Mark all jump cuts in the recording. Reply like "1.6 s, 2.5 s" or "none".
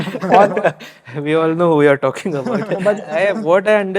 3.1 s